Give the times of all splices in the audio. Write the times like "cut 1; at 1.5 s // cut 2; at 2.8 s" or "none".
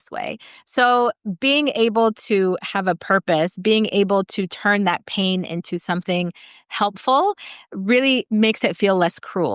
cut 1; at 8.3 s